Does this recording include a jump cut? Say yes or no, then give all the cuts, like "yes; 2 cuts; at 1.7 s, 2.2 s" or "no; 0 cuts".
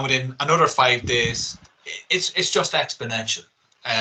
no; 0 cuts